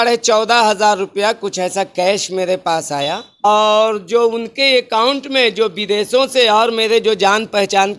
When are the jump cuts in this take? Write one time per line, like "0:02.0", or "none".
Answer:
0:03.4